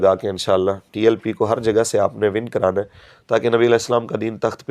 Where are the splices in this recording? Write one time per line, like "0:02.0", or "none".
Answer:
none